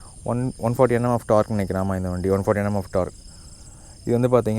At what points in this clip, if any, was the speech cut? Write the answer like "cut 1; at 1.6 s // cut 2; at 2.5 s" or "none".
none